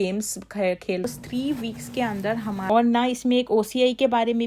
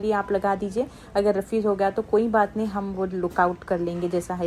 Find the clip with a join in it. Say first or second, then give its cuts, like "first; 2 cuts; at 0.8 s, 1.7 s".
first; 2 cuts; at 1.0 s, 2.7 s